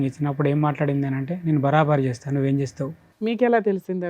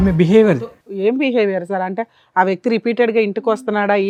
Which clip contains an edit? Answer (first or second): first